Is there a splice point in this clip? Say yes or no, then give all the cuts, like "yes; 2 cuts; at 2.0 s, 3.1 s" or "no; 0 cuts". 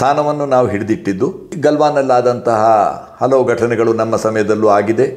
yes; 1 cut; at 1.4 s